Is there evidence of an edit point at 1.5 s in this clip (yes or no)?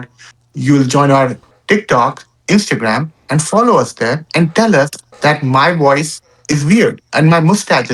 yes